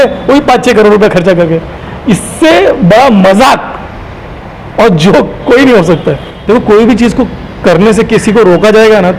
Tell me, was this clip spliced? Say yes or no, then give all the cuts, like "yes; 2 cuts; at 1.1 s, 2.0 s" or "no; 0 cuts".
yes; 1 cut; at 6.3 s